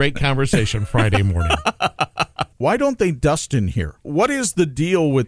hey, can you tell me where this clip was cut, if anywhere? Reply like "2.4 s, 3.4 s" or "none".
2.6 s, 4.1 s